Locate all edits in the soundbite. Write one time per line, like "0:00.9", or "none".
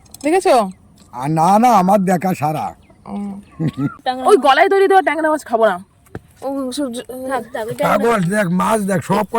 0:03.9